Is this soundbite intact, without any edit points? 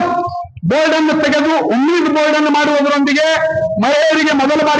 yes; 0 cuts

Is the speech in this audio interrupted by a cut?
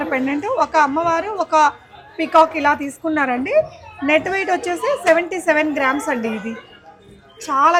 no; 0 cuts

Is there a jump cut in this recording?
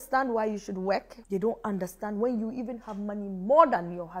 yes; 1 cut; at 1.2 s

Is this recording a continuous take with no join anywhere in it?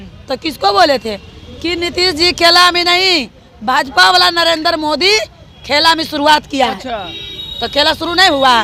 yes; 0 cuts

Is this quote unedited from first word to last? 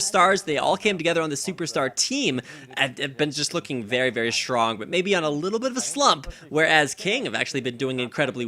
no; 1 cut; at 7.2 s

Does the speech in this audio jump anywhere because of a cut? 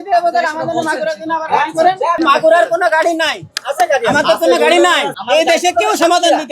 yes; 2 cuts; at 2.2 s, 5.1 s

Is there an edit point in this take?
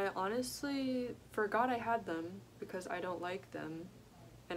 no; 0 cuts

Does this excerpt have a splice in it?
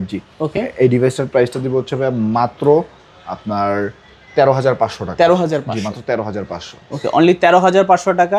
no; 0 cuts

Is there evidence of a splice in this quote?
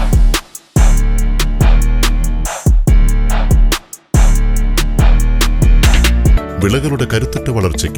yes; 1 cut; at 6.4 s

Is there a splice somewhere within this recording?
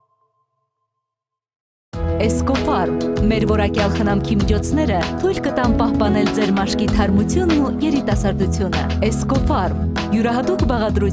no; 0 cuts

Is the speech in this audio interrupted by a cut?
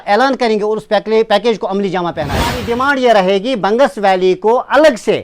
yes; 1 cut; at 2.6 s

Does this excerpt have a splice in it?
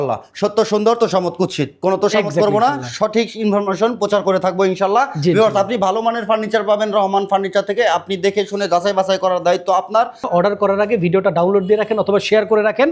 yes; 1 cut; at 10.3 s

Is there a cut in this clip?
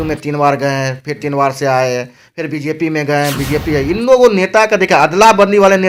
no; 0 cuts

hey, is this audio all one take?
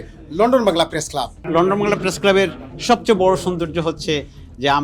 no; 1 cut; at 1.4 s

